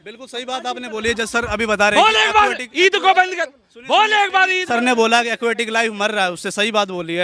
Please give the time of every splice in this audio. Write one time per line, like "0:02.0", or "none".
0:04.7

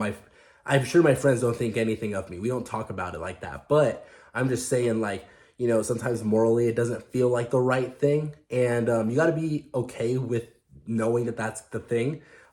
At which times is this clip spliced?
none

